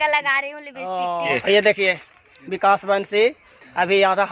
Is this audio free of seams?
no; 1 cut; at 1.3 s

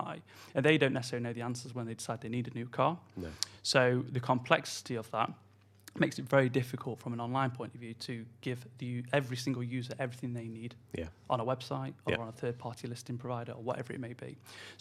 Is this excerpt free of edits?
yes; 0 cuts

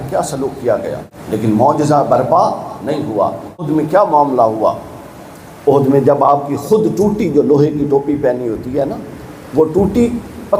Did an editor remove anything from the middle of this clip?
yes; 2 cuts; at 1.1 s, 3.7 s

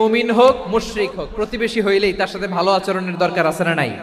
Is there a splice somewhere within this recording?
no; 0 cuts

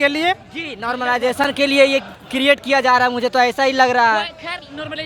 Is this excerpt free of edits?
yes; 0 cuts

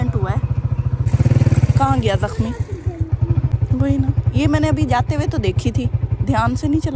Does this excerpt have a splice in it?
yes; 2 cuts; at 1.0 s, 3.5 s

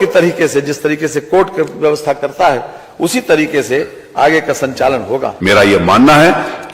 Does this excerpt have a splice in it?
yes; 1 cut; at 5.3 s

